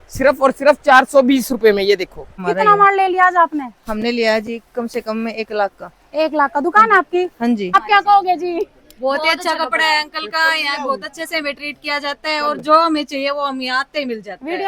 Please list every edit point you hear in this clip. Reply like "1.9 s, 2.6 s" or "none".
2.4 s, 7.7 s